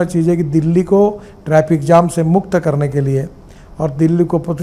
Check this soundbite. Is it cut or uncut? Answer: uncut